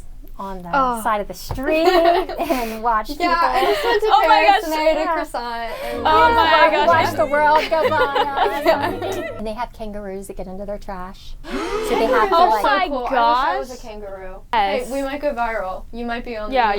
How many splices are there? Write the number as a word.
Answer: two